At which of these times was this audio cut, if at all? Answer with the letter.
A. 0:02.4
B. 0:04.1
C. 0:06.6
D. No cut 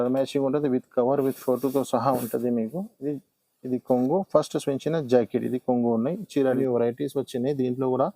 C